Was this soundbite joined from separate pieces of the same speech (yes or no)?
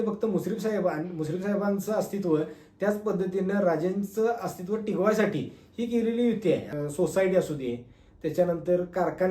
yes